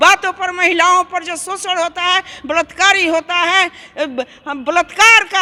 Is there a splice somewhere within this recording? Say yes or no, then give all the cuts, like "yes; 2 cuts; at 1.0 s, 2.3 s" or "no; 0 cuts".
no; 0 cuts